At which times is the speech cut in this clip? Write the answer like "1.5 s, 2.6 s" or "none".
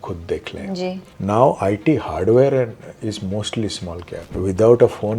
1.1 s, 4.2 s